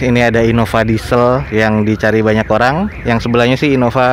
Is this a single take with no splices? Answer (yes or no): no